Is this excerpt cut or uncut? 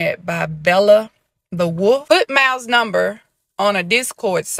cut